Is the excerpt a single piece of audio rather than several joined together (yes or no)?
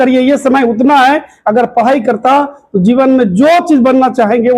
yes